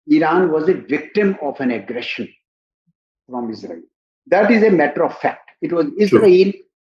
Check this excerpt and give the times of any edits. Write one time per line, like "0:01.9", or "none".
none